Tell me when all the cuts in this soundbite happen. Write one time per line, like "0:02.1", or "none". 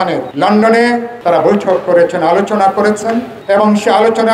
0:01.1